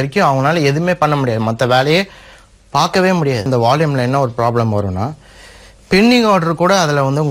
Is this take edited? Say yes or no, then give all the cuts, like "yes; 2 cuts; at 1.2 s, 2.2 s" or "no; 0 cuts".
yes; 1 cut; at 3.5 s